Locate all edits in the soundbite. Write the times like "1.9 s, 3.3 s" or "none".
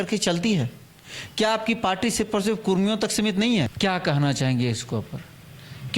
3.7 s